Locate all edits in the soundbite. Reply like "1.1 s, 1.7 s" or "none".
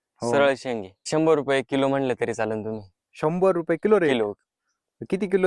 1.0 s